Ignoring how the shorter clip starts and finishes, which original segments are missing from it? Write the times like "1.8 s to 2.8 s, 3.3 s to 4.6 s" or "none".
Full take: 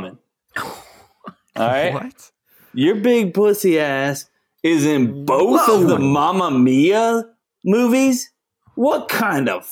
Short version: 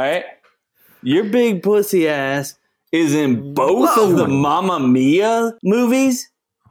7.3 s to 7.6 s